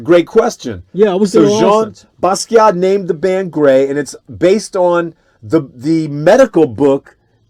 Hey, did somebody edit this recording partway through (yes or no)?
no